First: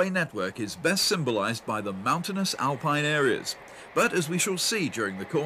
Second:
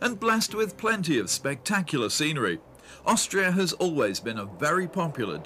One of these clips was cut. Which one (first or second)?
first